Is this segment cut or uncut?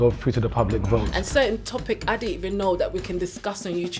cut